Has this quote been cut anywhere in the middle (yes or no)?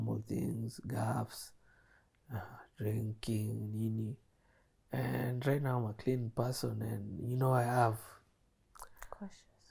no